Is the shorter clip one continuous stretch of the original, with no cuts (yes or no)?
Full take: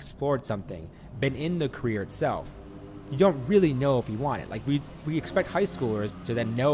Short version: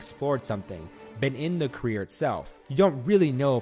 no